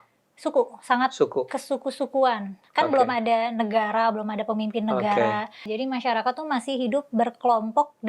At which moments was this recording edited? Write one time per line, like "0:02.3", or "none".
0:05.6